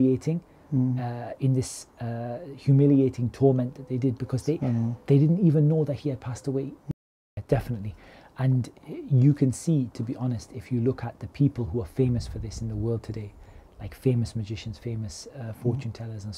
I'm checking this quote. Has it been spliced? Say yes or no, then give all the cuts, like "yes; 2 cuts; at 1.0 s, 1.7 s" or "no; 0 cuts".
yes; 1 cut; at 6.8 s